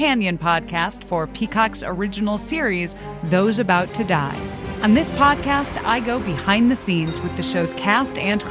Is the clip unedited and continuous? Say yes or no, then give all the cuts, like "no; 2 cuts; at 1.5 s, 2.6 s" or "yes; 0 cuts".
no; 1 cut; at 4.7 s